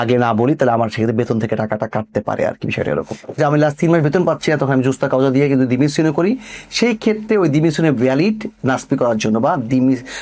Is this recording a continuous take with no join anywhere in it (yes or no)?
no